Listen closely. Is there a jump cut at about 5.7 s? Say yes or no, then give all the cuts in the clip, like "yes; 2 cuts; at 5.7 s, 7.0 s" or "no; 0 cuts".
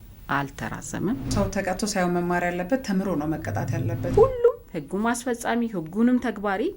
no; 2 cuts; at 1.3 s, 4.1 s